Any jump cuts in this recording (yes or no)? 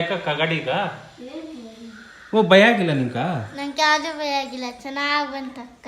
no